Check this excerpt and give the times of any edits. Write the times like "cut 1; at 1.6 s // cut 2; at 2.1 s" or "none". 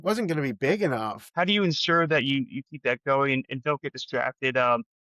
cut 1; at 1.2 s